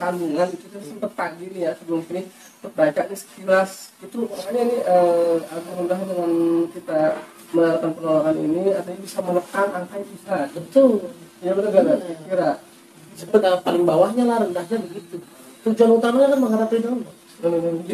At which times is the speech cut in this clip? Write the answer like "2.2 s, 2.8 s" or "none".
4.4 s, 13.4 s